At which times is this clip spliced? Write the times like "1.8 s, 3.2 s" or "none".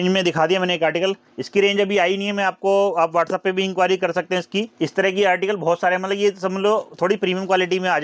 none